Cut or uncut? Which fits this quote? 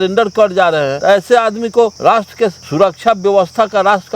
cut